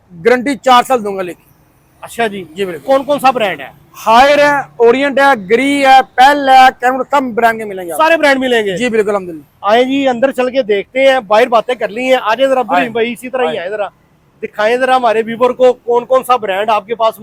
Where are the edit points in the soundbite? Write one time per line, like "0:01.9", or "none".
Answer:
none